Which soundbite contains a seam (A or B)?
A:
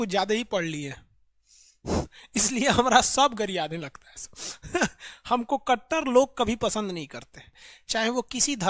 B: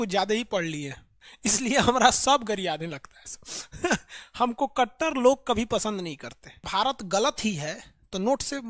B